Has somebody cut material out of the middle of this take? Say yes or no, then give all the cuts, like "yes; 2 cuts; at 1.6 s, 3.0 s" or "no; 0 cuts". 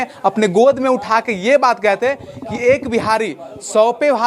no; 0 cuts